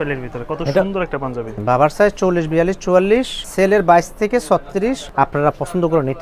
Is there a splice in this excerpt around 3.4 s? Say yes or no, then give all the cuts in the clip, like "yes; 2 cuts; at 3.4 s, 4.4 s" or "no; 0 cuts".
yes; 3 cuts; at 1.6 s, 3.4 s, 5.0 s